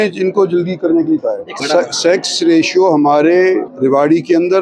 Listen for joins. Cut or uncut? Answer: cut